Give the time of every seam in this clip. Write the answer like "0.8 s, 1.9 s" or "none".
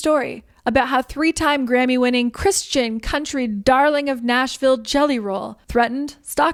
none

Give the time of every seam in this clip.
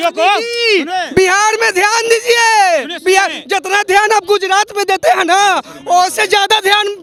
none

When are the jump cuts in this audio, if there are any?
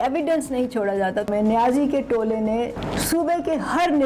1.3 s, 2.8 s

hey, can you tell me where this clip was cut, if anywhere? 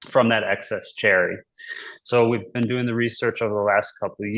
none

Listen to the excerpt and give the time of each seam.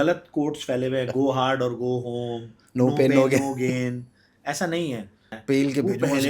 5.3 s

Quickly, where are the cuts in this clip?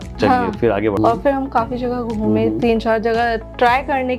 1.0 s

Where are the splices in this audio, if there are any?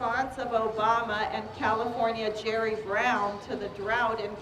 1.8 s

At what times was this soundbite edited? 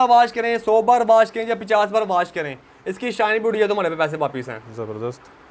none

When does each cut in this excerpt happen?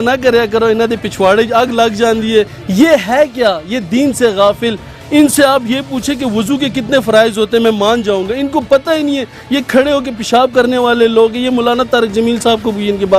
2.6 s

